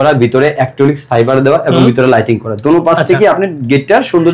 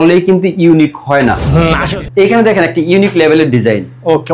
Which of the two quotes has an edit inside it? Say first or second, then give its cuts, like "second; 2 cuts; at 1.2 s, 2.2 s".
second; 1 cut; at 1.9 s